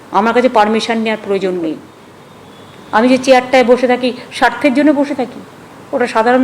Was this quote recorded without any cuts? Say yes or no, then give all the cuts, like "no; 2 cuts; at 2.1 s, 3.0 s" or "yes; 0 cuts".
no; 1 cut; at 1.9 s